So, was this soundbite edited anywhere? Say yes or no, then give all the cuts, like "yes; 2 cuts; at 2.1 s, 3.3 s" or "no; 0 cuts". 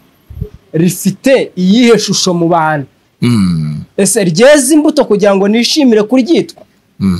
no; 0 cuts